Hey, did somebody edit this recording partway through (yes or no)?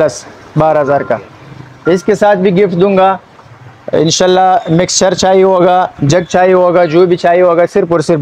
no